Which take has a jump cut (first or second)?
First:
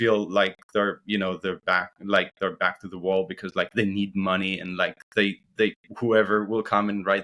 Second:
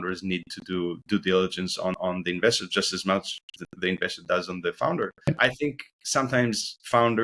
second